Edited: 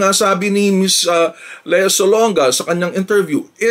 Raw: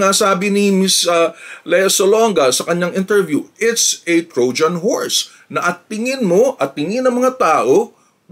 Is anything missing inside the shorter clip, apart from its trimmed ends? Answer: no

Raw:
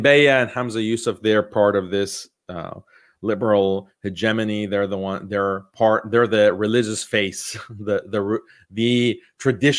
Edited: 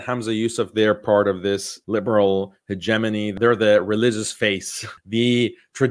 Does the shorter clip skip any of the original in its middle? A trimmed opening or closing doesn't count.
yes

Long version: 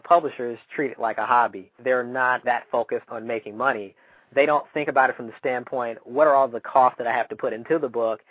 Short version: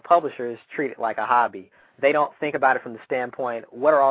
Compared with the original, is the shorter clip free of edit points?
no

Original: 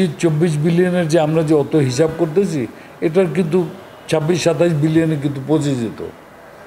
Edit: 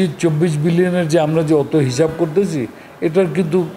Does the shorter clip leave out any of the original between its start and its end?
no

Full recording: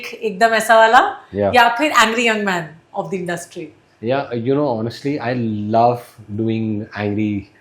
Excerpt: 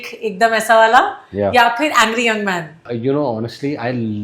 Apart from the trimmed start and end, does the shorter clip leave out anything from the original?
yes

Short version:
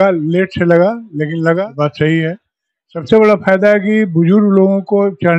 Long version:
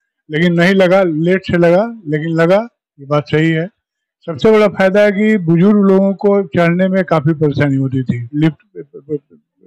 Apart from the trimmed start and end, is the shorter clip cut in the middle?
yes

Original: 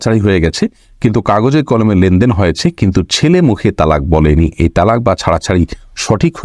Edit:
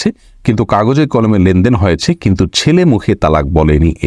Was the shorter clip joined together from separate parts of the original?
no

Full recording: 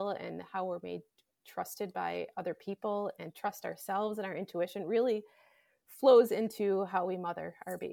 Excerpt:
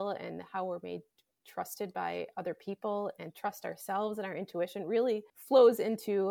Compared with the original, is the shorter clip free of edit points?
no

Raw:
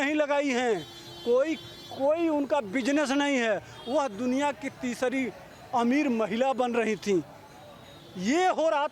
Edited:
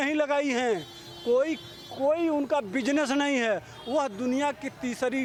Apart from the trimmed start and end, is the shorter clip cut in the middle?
no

